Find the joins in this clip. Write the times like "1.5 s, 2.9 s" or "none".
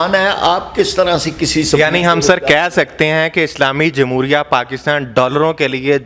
none